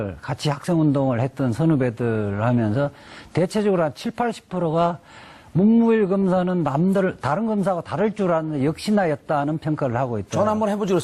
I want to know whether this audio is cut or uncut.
uncut